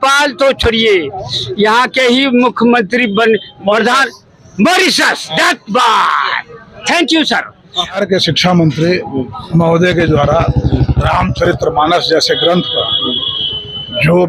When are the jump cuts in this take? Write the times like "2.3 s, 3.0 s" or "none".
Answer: 8.0 s